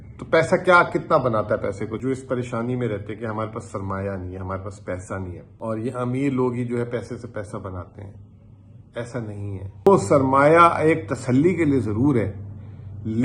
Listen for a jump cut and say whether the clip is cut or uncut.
cut